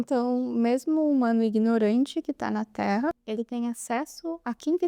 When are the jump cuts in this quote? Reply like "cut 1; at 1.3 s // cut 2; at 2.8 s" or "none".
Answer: cut 1; at 3.2 s